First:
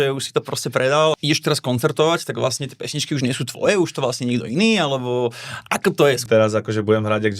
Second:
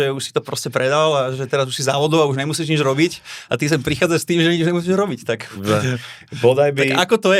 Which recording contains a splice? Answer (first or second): first